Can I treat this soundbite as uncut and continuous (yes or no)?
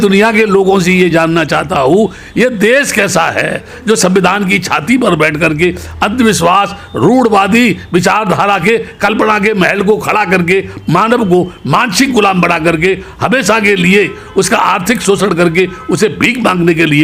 yes